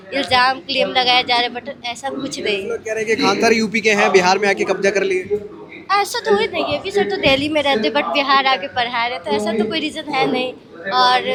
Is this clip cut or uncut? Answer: uncut